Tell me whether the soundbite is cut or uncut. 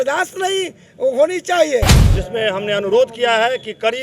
cut